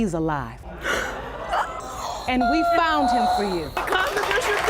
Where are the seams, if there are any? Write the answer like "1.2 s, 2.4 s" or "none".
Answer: 1.8 s, 3.8 s